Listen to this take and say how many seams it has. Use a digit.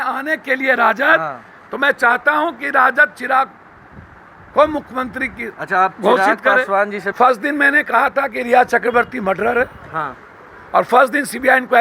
1